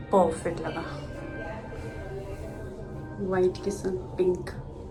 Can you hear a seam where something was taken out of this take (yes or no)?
no